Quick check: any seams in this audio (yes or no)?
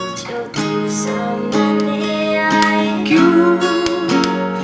no